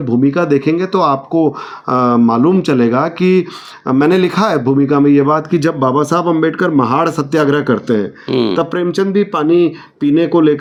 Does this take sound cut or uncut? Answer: uncut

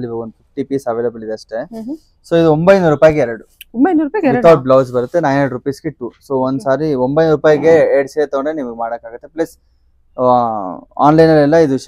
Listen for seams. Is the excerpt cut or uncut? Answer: uncut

